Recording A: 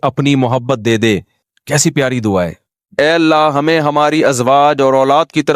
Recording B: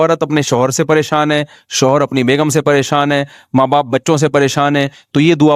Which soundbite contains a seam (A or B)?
A